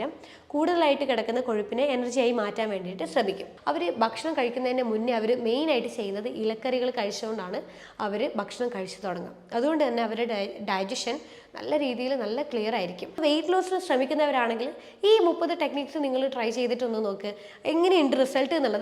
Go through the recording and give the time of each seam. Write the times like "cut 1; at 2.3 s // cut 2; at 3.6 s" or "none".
cut 1; at 3.5 s // cut 2; at 13.2 s

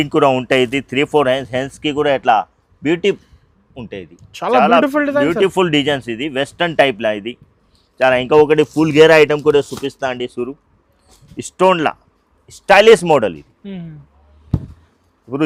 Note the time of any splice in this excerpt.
none

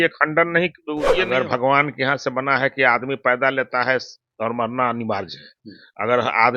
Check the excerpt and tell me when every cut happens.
cut 1; at 1.1 s

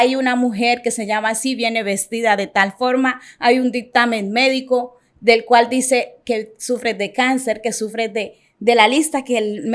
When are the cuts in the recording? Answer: none

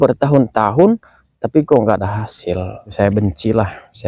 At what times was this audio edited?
cut 1; at 2.9 s

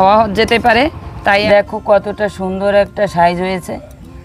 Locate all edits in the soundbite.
cut 1; at 1.4 s

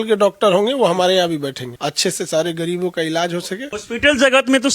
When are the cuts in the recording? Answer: cut 1; at 1.7 s // cut 2; at 3.7 s

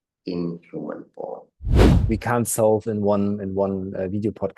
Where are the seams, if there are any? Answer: cut 1; at 1.8 s

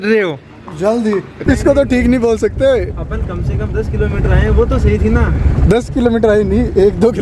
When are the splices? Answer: cut 1; at 1.3 s

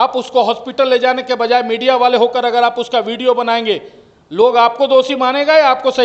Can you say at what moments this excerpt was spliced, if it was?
none

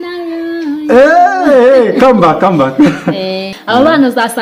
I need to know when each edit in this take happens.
cut 1; at 3.5 s

